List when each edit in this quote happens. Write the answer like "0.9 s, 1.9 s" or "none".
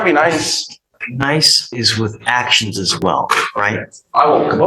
1.0 s